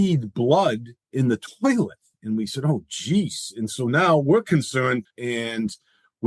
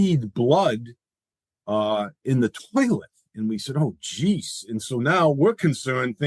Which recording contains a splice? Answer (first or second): first